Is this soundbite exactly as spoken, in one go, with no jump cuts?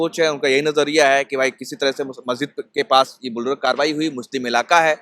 yes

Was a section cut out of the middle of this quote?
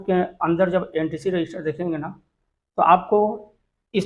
no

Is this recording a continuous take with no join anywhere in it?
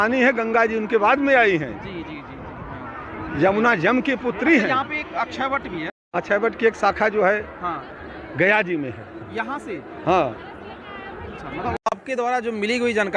no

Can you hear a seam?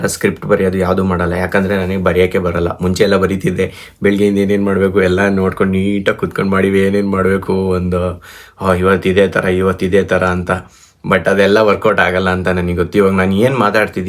no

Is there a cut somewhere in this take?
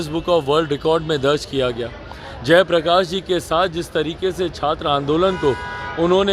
no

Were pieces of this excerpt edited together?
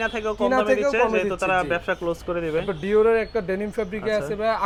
no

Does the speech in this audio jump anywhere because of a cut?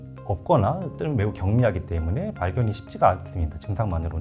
no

